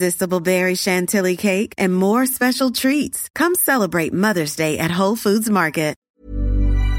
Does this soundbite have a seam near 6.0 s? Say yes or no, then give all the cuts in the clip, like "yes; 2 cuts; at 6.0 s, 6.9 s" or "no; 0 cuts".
yes; 1 cut; at 6.0 s